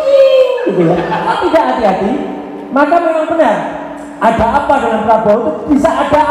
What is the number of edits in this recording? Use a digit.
1